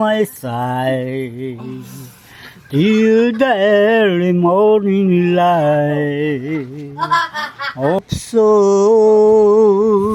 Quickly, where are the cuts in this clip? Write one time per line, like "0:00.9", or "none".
0:08.0

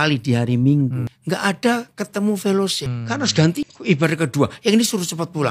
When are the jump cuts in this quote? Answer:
0:01.1
0:02.9
0:03.7

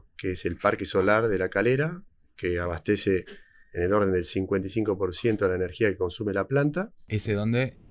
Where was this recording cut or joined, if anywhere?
none

